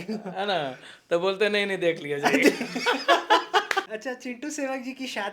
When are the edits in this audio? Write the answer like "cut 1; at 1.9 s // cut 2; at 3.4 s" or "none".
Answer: cut 1; at 3.9 s